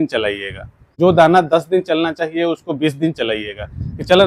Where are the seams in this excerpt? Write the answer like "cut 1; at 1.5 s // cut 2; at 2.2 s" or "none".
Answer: cut 1; at 0.9 s